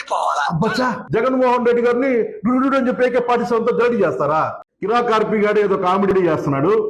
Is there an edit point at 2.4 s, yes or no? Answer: no